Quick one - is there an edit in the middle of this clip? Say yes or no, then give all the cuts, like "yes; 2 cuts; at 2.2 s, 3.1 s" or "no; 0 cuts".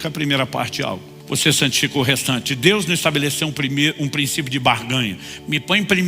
yes; 1 cut; at 1.1 s